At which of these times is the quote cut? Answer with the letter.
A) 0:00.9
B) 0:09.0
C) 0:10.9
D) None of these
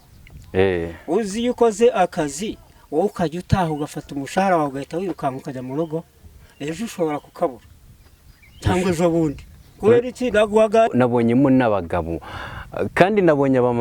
C